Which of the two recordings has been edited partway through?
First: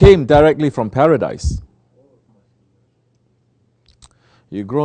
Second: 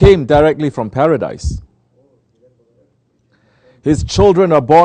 second; 1 cut; at 2.3 s

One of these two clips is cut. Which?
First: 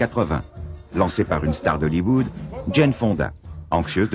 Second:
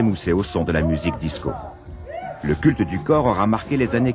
second; 1 cut; at 1.7 s

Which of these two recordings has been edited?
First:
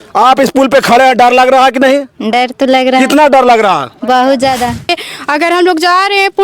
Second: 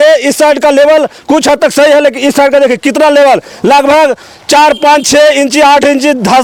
first; 1 cut; at 4.9 s

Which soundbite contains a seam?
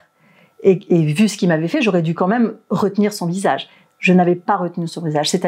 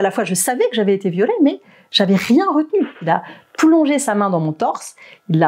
second; 1 cut; at 3.0 s

